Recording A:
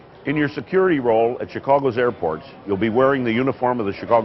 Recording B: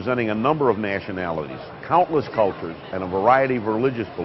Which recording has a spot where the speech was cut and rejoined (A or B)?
B